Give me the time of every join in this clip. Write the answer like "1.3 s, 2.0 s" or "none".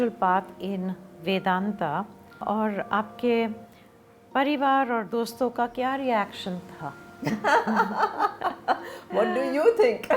none